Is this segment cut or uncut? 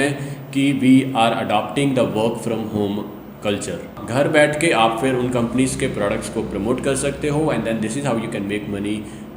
cut